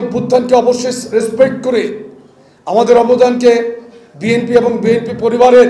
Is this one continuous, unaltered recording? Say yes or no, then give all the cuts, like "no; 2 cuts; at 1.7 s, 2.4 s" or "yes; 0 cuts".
yes; 0 cuts